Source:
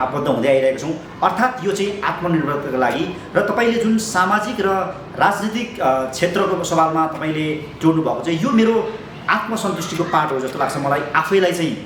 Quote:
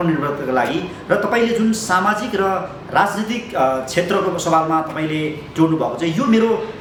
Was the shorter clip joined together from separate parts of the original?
no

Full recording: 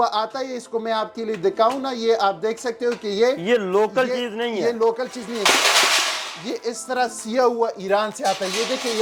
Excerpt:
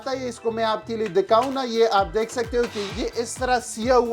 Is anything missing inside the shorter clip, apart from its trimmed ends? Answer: yes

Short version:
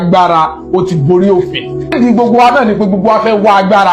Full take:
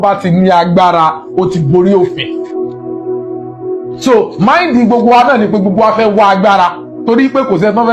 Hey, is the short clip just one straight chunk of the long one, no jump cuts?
no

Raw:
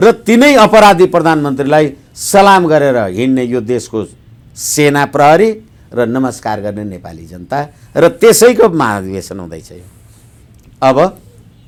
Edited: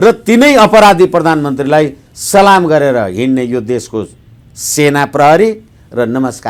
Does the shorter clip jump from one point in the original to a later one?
no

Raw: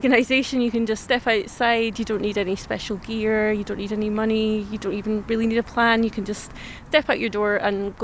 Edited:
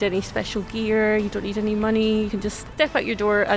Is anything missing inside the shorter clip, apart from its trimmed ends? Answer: yes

